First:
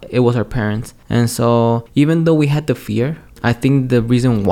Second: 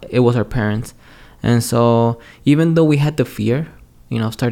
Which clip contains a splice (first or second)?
first